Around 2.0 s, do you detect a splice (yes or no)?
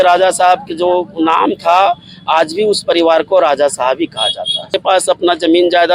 no